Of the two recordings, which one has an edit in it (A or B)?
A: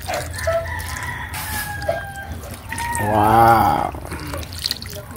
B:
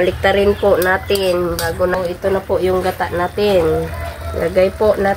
B